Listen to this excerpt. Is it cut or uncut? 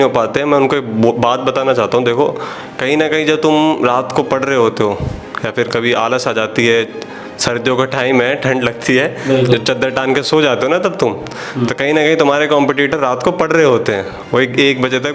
uncut